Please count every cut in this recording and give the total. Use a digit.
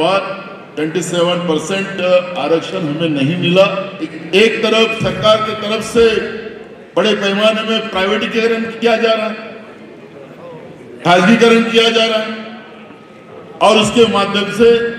1